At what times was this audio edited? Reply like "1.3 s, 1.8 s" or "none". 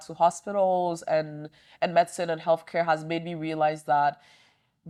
none